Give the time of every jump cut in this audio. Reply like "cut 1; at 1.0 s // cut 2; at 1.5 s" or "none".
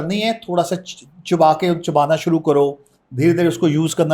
none